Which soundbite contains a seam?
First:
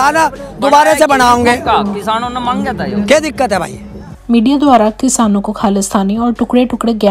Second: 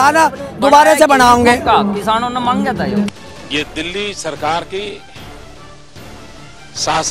second; 1 cut; at 3.1 s

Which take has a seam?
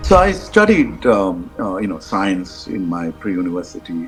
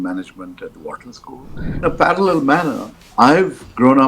second; 1 cut; at 1.8 s

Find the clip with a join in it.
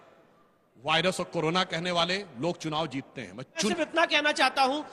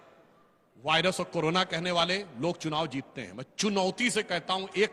first; 1 cut; at 3.7 s

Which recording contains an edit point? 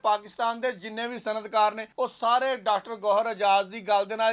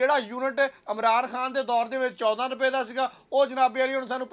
first; 1 cut; at 1.8 s

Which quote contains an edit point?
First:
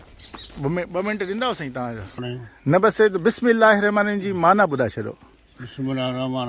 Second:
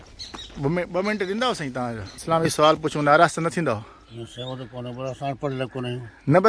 first; 1 cut; at 2.1 s

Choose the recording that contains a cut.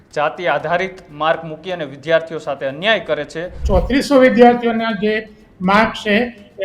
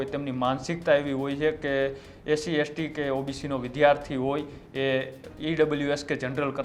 first; 1 cut; at 3.6 s

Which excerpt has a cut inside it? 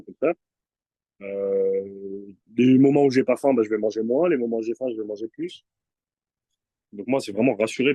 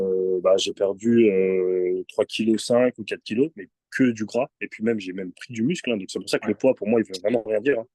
first; 1 cut; at 6.5 s

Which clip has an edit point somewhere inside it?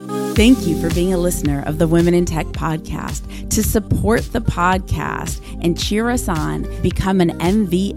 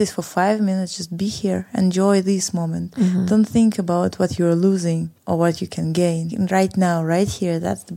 second; 2 cuts; at 5.1 s, 6.3 s

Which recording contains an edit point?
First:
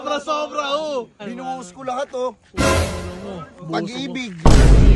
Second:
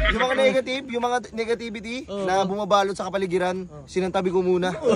first; 1 cut; at 1.2 s

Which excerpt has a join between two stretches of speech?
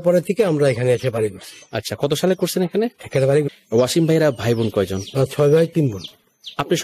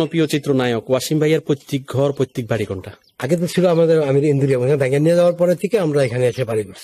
first; 1 cut; at 3.5 s

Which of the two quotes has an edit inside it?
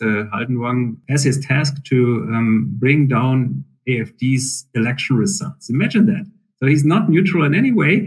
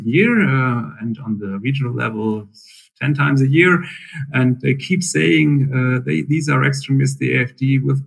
first; 1 cut; at 1.0 s

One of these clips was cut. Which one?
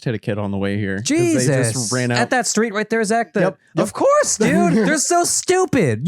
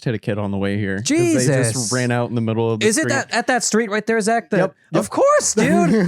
first; 2 cuts; at 2.2 s, 4.9 s

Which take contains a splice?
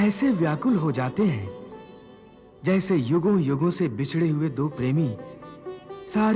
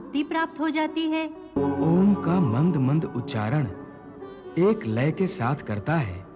second; 1 cut; at 1.6 s

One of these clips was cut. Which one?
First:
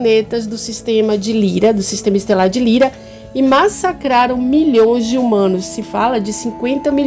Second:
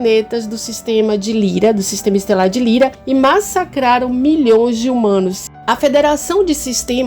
second; 2 cuts; at 3.0 s, 5.5 s

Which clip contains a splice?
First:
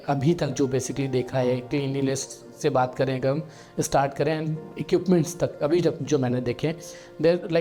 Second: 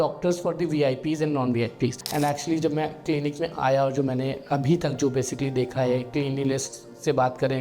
second; 1 cut; at 2.0 s

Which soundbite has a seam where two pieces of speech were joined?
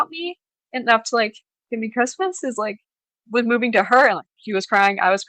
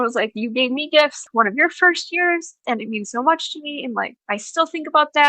second; 3 cuts; at 1.2 s, 2.6 s, 4.2 s

